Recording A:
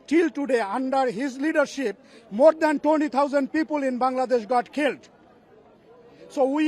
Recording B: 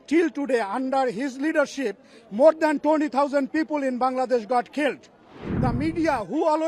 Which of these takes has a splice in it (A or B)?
B